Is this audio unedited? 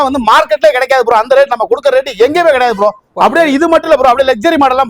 yes; 0 cuts

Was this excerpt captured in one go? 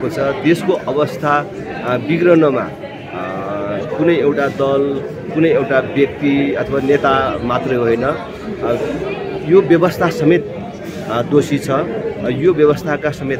yes; 0 cuts

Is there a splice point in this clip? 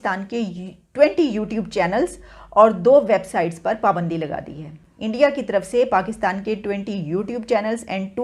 no; 0 cuts

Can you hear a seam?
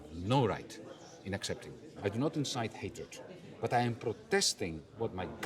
yes; 1 cut; at 2.0 s

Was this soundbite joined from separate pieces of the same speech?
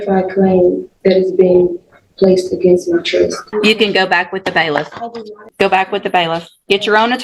yes; 2 cuts; at 3.4 s, 5.5 s

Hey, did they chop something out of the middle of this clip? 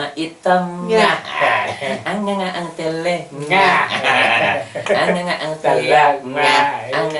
no; 0 cuts

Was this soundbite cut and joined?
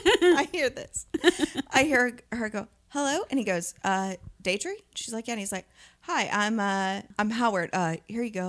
yes; 1 cut; at 7.1 s

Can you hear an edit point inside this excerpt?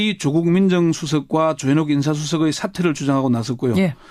no; 0 cuts

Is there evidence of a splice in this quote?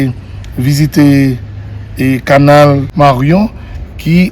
yes; 1 cut; at 2.9 s

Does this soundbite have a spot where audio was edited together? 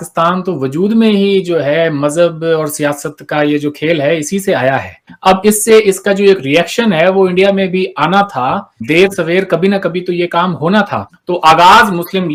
no; 0 cuts

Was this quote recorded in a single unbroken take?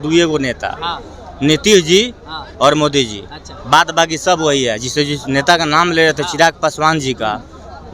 yes; 0 cuts

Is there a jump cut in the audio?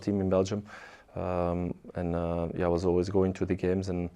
no; 0 cuts

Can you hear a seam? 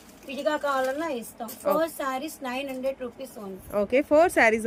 no; 0 cuts

